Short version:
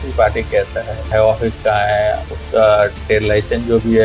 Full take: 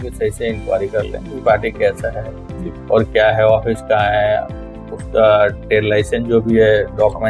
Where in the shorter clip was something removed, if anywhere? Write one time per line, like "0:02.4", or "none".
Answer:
0:01.1
0:02.3